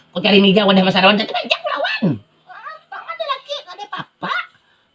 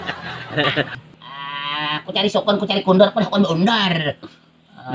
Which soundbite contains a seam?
second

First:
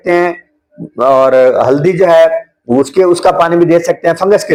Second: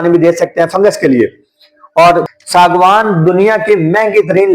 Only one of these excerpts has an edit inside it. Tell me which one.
second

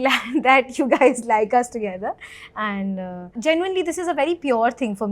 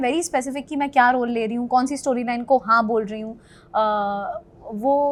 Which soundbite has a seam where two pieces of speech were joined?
first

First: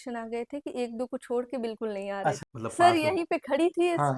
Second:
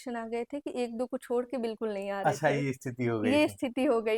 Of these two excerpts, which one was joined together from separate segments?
first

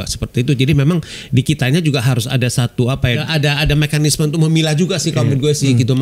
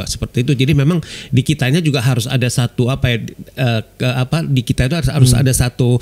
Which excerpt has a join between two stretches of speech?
first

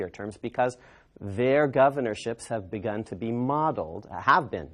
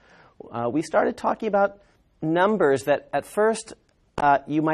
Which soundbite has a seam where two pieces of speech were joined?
first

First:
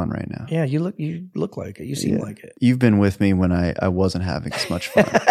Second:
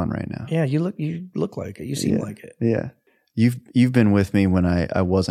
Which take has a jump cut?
first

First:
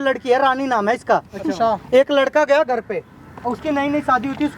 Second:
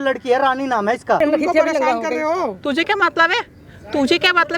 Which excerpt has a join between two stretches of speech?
second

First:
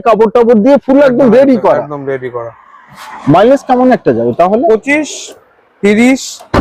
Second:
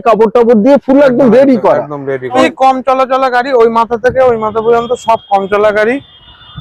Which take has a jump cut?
second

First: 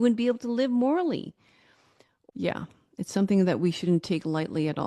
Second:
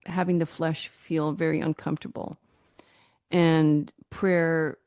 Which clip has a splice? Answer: first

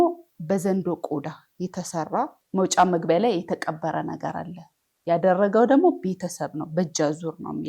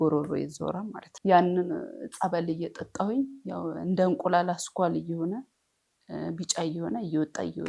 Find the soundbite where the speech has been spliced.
first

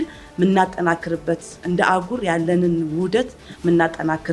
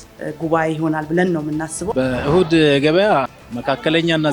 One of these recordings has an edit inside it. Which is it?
second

